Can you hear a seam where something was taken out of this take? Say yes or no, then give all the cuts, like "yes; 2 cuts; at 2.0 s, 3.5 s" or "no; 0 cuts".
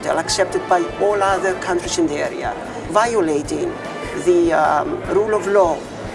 yes; 1 cut; at 2.8 s